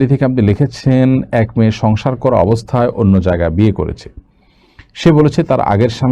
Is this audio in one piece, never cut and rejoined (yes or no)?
yes